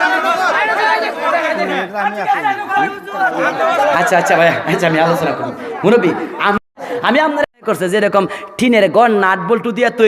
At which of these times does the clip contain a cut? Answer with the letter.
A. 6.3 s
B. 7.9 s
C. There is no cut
B